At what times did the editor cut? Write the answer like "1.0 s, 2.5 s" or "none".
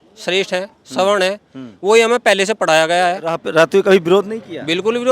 3.4 s